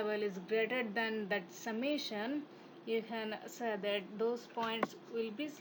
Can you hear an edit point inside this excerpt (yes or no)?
no